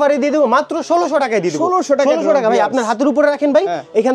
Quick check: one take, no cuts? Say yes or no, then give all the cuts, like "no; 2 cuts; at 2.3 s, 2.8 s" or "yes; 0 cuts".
yes; 0 cuts